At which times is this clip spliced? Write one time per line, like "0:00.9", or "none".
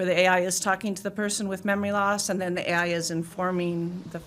none